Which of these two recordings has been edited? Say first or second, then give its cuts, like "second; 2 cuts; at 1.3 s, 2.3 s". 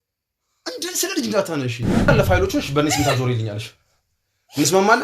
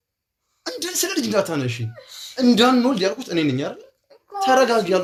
first; 1 cut; at 2.1 s